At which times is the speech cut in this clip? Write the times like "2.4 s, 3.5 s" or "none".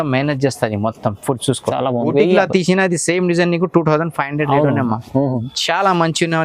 2.1 s, 5.5 s